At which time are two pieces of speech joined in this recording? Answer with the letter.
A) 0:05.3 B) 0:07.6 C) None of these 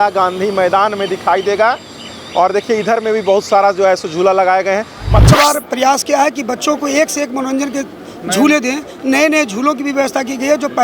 A